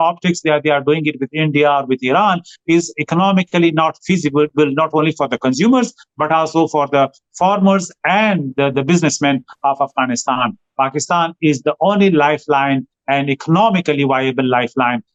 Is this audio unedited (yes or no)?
yes